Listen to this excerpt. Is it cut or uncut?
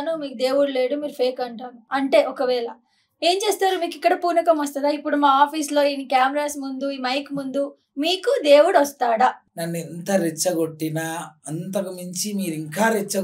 cut